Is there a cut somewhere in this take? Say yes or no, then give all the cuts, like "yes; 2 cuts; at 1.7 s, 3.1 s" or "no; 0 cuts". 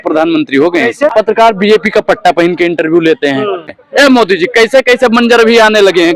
yes; 2 cuts; at 1.1 s, 3.7 s